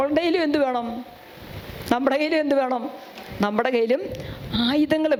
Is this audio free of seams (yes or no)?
yes